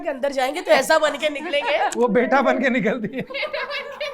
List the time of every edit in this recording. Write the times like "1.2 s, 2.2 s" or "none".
1.9 s, 3.3 s